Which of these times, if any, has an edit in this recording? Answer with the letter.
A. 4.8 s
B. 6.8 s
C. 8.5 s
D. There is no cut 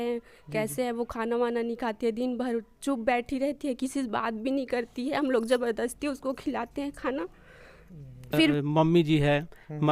C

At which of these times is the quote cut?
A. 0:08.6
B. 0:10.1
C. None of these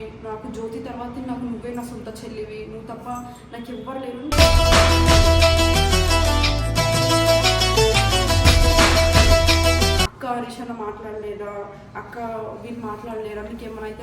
B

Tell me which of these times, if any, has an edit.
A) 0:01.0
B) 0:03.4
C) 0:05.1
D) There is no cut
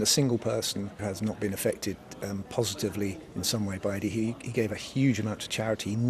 A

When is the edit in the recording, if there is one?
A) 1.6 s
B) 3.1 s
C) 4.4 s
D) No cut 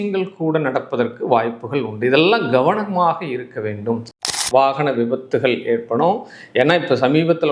C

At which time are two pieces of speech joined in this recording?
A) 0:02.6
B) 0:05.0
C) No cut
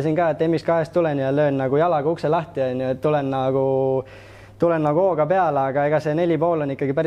C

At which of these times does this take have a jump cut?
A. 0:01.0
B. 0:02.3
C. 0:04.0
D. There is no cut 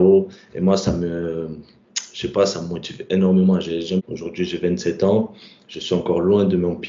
C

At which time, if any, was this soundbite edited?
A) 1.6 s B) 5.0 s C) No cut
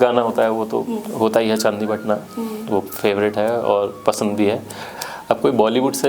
B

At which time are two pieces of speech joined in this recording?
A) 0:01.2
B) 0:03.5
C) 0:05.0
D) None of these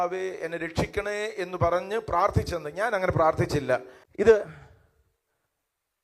B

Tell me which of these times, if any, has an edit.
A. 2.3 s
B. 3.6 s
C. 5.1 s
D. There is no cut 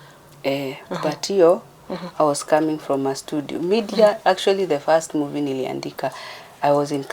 D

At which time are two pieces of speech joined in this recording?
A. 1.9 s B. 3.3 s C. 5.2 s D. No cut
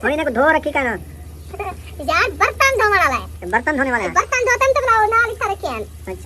B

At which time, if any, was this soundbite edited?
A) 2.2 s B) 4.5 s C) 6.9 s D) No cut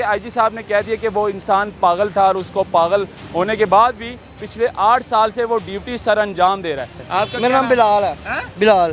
C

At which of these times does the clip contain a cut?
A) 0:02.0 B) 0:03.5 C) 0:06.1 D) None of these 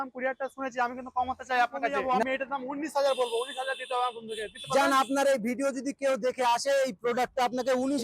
A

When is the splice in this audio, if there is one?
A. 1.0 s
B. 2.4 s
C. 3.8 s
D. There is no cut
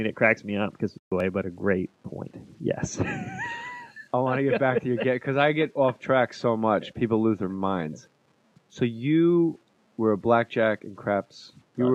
D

